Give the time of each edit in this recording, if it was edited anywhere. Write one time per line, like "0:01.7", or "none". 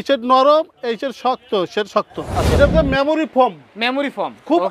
0:02.6